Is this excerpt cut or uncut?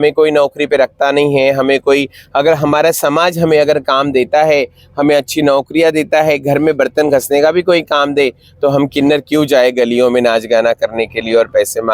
uncut